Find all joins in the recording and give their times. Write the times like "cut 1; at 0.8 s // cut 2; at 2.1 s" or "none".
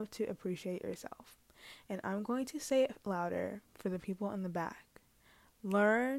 none